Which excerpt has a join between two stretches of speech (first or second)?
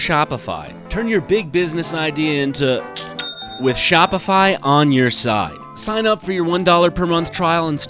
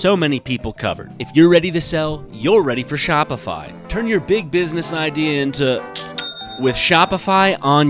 second